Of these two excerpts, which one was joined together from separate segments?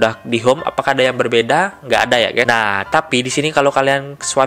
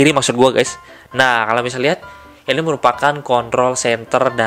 first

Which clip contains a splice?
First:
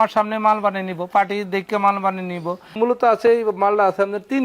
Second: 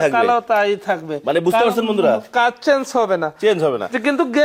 first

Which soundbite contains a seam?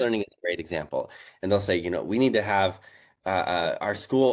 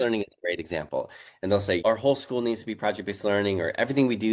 second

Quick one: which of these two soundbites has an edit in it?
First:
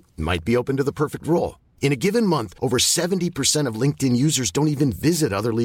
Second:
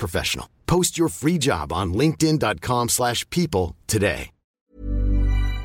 second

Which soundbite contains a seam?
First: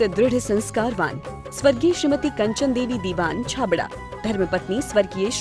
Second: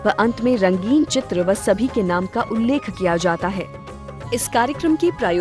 second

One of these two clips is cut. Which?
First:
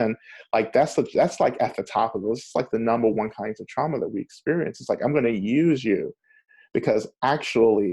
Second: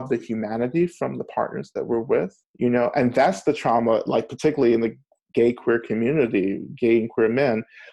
second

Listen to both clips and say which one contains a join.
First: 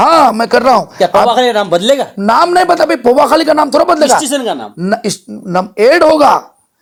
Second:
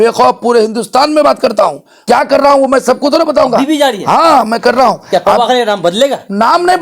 second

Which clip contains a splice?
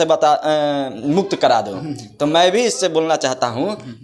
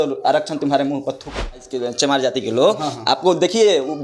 second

